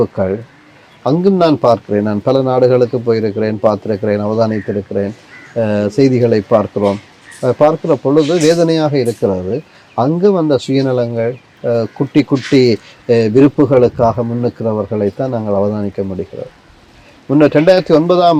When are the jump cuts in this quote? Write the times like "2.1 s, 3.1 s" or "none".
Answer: none